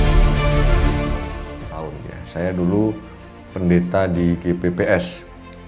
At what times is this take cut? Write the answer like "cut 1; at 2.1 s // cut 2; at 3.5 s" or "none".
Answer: cut 1; at 2.2 s